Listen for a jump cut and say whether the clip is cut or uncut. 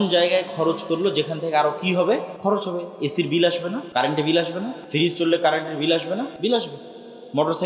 cut